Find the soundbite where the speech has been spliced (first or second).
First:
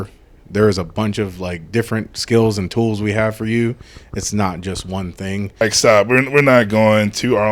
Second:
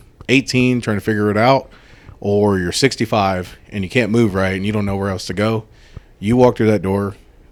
first